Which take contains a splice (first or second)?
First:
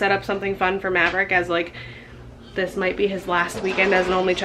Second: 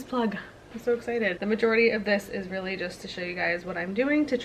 second